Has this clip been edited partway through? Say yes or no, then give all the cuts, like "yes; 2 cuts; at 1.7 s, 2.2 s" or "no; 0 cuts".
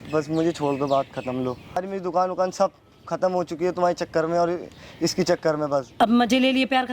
yes; 2 cuts; at 1.8 s, 5.9 s